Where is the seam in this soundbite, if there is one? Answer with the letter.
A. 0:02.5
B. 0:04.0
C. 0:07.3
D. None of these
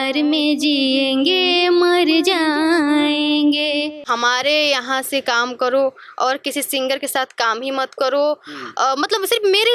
B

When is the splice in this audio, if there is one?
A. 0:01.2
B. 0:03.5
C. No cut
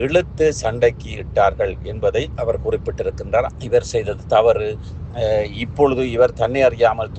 B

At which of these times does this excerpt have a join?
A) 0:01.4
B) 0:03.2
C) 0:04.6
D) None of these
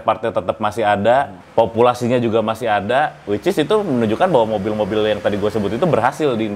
A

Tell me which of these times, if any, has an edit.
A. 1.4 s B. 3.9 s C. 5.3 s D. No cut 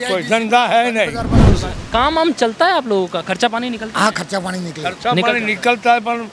A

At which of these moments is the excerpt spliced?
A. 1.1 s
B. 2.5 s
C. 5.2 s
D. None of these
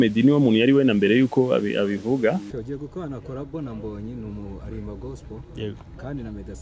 B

